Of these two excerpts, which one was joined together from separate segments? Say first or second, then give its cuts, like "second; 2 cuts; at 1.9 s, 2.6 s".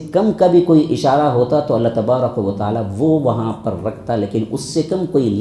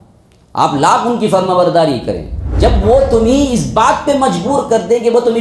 second; 1 cut; at 2.5 s